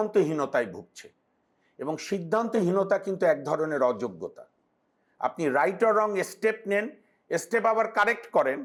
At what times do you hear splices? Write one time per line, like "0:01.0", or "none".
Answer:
none